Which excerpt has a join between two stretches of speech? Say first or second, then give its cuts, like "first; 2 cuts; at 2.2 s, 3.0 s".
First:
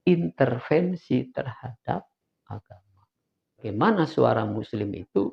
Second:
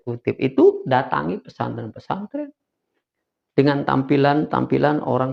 first; 1 cut; at 3.7 s